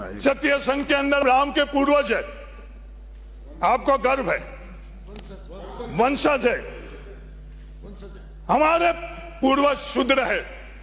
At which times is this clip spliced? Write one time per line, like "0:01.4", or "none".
0:01.2